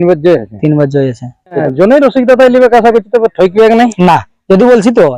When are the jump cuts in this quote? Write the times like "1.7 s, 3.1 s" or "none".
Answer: 1.6 s